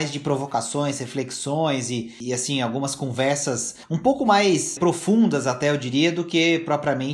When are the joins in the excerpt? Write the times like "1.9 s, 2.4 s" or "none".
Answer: 2.2 s, 3.8 s, 4.8 s